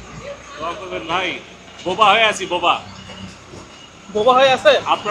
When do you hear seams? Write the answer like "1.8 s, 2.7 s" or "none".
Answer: none

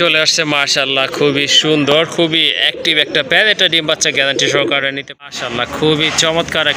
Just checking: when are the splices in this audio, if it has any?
5.2 s

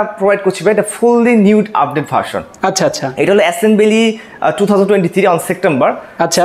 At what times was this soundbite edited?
none

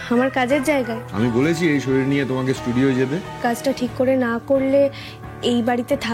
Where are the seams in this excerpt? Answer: 1.0 s, 3.4 s

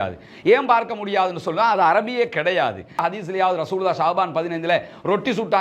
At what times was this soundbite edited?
3.0 s

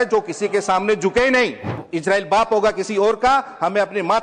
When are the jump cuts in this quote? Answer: 1.8 s

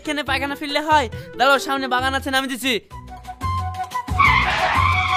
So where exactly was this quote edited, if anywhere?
none

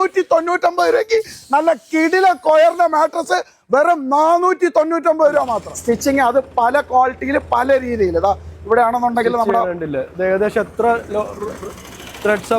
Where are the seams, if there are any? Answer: 5.7 s

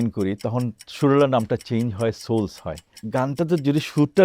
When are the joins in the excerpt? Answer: 3.0 s

